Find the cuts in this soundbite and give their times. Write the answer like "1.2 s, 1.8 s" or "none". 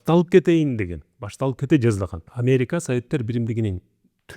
2.2 s